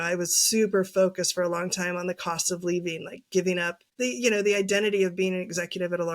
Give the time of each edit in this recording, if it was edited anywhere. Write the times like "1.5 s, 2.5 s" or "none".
3.8 s